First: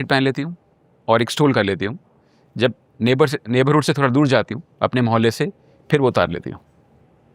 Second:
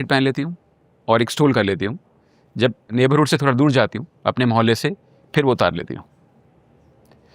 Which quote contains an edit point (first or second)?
second